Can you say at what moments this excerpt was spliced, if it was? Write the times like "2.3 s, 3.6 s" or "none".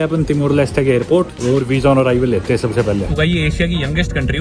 1.4 s, 3.1 s